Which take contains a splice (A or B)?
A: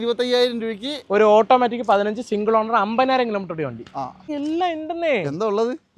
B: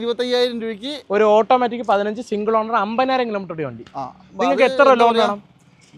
A